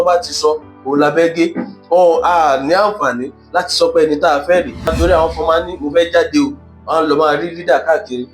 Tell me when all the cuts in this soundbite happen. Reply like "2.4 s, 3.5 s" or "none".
4.9 s